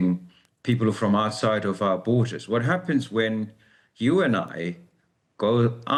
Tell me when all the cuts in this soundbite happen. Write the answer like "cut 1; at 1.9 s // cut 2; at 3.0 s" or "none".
none